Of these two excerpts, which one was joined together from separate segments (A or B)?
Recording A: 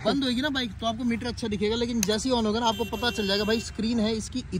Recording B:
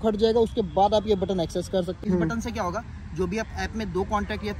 B